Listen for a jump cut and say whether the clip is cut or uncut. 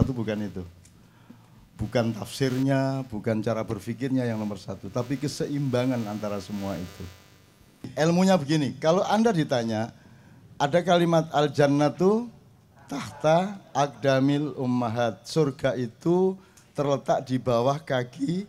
cut